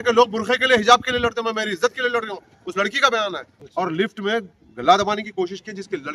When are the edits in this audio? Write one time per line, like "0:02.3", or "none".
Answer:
0:03.6